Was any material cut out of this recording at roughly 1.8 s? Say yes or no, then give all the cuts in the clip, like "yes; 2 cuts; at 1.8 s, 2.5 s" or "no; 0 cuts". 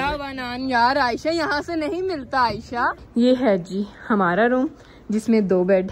no; 1 cut; at 3.0 s